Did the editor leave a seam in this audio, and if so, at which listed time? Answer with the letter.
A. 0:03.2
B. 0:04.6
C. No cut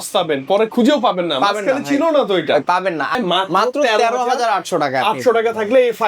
A